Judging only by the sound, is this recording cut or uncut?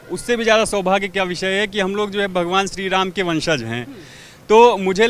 uncut